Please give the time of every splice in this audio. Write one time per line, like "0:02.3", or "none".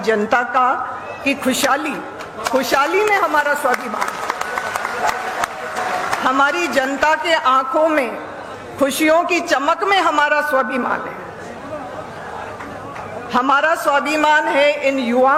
none